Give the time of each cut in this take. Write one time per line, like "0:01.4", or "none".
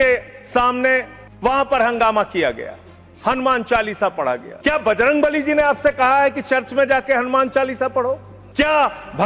0:01.2
0:04.5
0:08.3